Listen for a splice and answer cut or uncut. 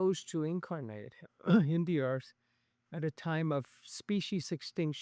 uncut